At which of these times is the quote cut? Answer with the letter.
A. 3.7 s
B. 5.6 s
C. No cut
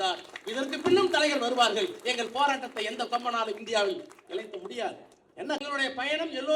B